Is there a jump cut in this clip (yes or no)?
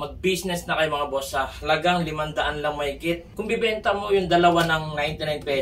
yes